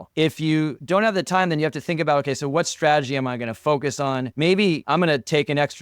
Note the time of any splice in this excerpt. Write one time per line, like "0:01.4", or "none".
0:04.8